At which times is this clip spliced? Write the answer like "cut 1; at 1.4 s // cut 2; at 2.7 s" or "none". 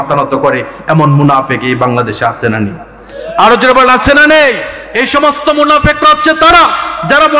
cut 1; at 4.8 s